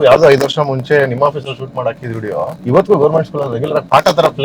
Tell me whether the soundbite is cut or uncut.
cut